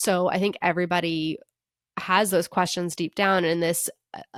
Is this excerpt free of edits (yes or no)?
yes